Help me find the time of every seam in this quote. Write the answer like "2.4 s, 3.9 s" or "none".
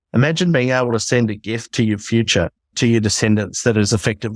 2.7 s